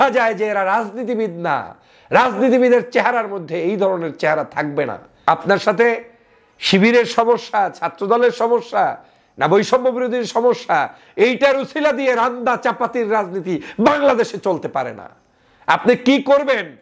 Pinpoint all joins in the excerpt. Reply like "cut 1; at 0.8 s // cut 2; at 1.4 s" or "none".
cut 1; at 5.1 s